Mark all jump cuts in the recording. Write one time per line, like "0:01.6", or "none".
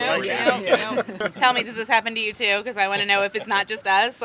0:01.1